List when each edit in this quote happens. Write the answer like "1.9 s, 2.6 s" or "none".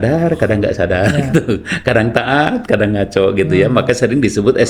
none